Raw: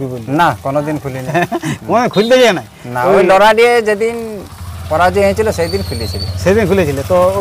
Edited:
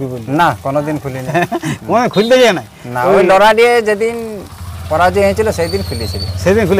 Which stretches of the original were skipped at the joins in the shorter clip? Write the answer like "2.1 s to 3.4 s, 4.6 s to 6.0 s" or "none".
none

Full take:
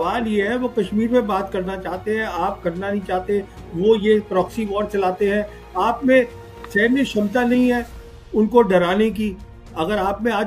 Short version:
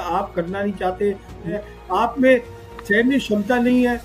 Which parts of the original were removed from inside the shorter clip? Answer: 3.8 s to 5.4 s

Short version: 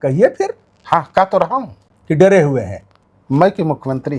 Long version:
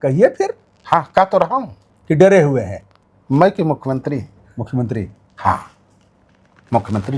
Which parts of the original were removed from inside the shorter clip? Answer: none

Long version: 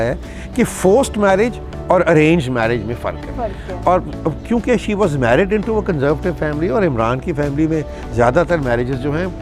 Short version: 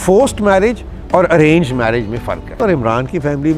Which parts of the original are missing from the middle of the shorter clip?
3.3 s to 6.7 s

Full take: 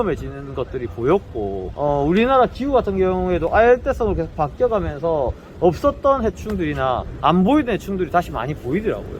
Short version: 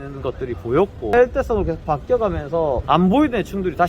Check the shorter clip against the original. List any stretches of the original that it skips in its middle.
1.5 s to 3.6 s, 5.3 s to 7.2 s

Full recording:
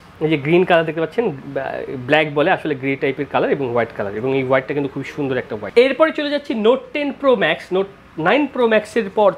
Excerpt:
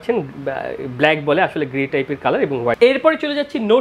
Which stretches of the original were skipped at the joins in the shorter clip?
3.9 s to 5.7 s

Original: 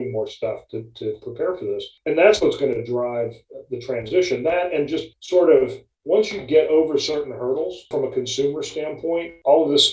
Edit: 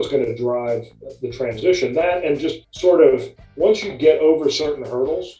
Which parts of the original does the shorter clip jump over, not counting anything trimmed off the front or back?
none

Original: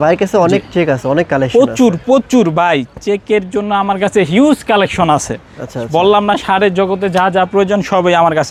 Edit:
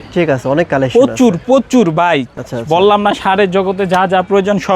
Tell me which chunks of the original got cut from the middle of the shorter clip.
2.9 s to 5.6 s

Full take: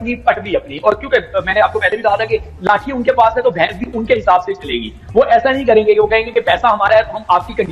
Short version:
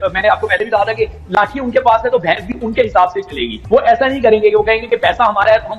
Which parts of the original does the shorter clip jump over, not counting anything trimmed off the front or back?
4.8 s to 5.0 s

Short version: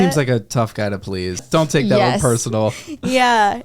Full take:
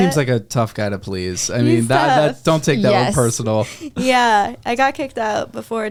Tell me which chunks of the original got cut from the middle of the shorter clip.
1.4 s to 2.4 s

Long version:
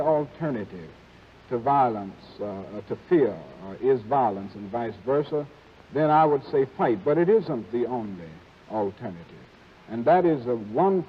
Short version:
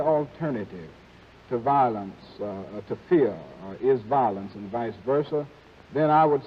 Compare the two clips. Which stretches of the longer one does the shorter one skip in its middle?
none

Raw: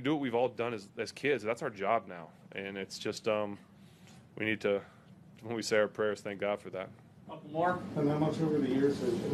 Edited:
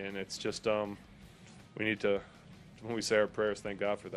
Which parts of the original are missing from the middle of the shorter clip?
none

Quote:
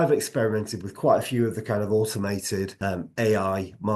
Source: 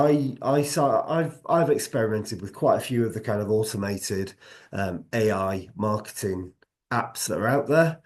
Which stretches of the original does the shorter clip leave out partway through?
4.3 s to 4.7 s

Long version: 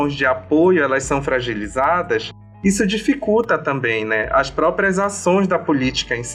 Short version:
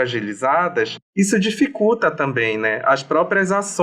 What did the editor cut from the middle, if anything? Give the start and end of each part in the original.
2.3 s to 2.5 s

